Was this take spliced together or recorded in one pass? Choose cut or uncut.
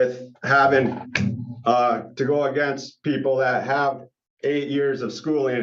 uncut